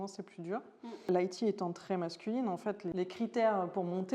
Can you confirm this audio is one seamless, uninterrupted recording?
no; 2 cuts; at 1.0 s, 2.9 s

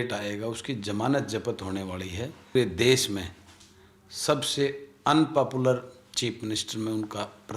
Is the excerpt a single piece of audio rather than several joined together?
no; 1 cut; at 2.5 s

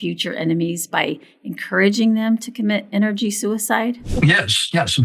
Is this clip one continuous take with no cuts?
yes; 0 cuts

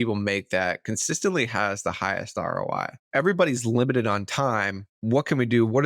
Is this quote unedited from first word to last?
yes; 0 cuts

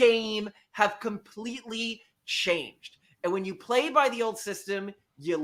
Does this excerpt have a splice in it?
no; 0 cuts

